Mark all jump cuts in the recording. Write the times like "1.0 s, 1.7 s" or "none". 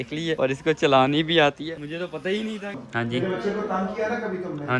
2.8 s